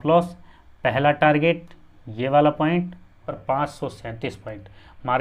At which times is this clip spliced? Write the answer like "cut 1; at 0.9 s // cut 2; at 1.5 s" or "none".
cut 1; at 3.3 s